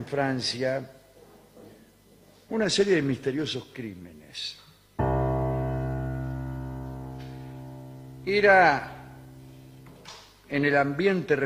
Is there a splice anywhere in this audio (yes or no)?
yes